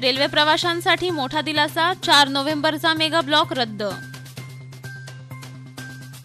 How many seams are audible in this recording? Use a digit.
2